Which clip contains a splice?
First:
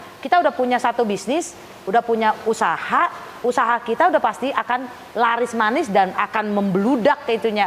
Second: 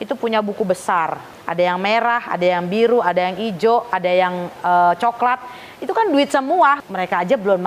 second; 2 cuts; at 1.3 s, 6.8 s

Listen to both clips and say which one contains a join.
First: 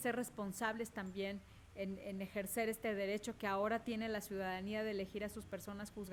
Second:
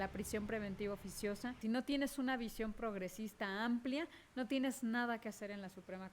second; 1 cut; at 1.5 s

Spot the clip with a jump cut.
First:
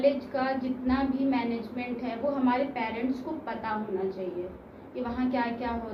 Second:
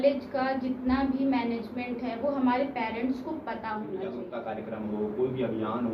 second; 1 cut; at 4.3 s

